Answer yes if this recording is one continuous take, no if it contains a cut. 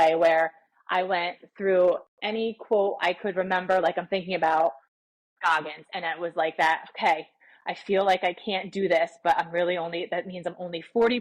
yes